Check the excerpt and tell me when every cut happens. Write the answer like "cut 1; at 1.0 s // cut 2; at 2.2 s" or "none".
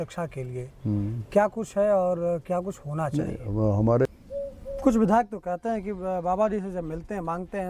cut 1; at 4.1 s